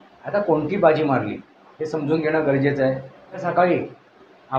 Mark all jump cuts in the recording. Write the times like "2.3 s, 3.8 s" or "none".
3.4 s